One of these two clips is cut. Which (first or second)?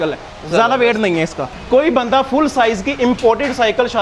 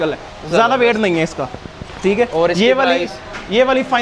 first